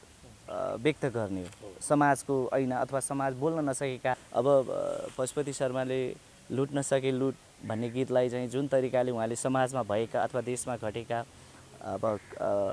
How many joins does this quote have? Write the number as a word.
one